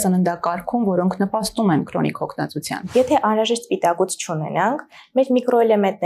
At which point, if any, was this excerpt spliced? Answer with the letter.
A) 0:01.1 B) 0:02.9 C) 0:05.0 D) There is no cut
B